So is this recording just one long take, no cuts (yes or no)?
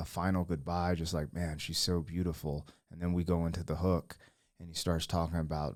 yes